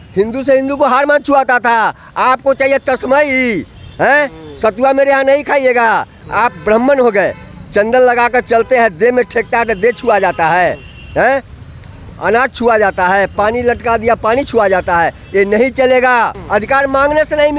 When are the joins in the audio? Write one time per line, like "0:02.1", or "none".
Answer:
0:06.2
0:16.4